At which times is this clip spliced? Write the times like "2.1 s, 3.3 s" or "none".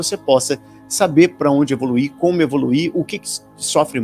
none